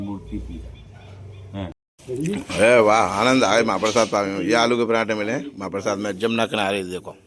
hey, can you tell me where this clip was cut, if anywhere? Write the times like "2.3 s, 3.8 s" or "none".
1.9 s